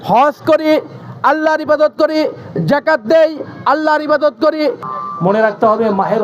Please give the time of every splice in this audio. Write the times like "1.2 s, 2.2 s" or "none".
4.9 s